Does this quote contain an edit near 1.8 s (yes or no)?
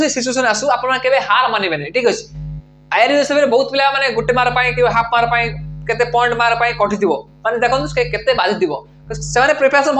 no